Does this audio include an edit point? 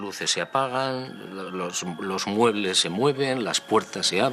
no; 0 cuts

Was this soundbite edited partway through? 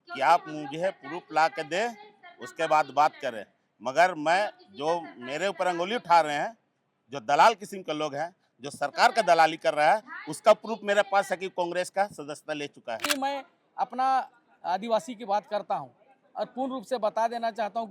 yes; 1 cut; at 13.0 s

